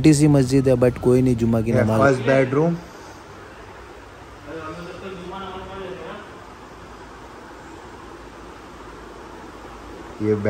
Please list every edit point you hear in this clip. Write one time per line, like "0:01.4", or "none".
0:01.9